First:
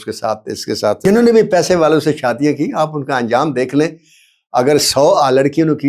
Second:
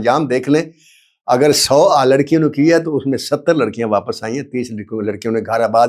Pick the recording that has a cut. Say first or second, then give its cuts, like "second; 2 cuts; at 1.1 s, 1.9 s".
first; 1 cut; at 1.0 s